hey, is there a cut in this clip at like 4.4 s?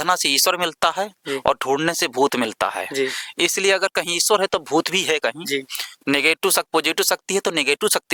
no; 0 cuts

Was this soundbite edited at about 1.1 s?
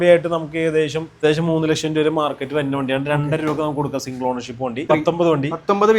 yes; 2 cuts; at 1.1 s, 4.9 s

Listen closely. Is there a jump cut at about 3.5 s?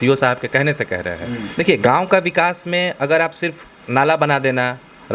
no; 1 cut; at 1.5 s

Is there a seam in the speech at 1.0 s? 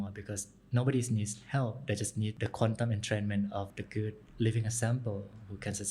no; 2 cuts; at 2.3 s, 3.8 s

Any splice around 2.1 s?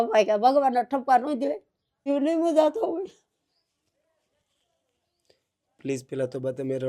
yes; 1 cut; at 2.1 s

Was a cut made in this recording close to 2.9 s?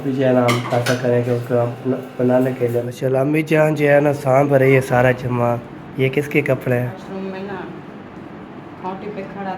yes; 2 cuts; at 2.9 s, 7.0 s

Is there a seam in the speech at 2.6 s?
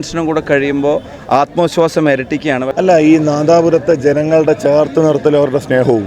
yes; 1 cut; at 2.6 s

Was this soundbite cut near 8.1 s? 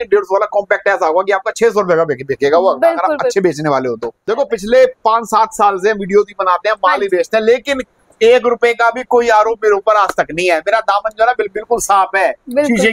no; 1 cut; at 4.2 s

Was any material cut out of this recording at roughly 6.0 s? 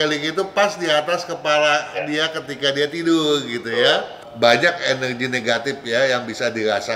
no; 1 cut; at 4.2 s

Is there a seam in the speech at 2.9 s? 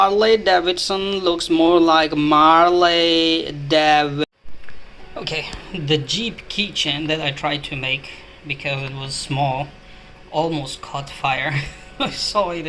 no; 1 cut; at 4.2 s

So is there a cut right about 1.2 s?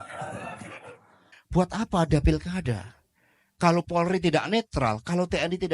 yes; 1 cut; at 1.2 s

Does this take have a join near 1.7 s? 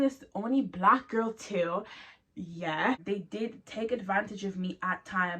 no; 1 cut; at 3.0 s

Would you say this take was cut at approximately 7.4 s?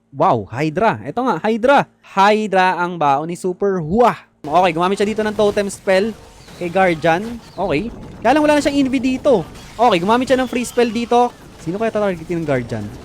yes; 4 cuts; at 2.0 s, 4.4 s, 7.4 s, 11.3 s

